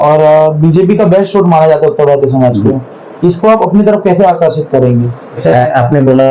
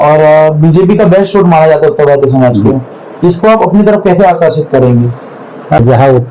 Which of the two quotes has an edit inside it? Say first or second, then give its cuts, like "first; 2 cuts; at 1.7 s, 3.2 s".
second; 1 cut; at 5.2 s